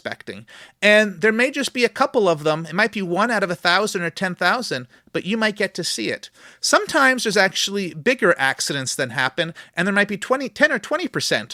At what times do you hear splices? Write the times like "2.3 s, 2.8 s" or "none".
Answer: none